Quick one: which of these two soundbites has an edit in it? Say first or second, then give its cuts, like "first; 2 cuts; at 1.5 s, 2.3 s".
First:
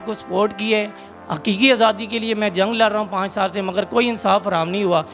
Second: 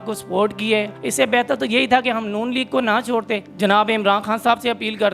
second; 2 cuts; at 1.0 s, 3.5 s